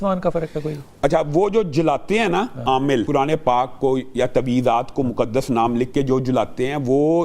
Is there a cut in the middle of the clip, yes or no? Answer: yes